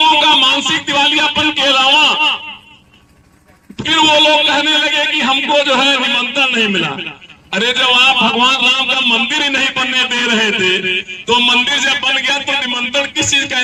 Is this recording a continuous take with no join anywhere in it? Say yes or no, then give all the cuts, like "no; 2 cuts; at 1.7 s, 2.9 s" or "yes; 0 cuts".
yes; 0 cuts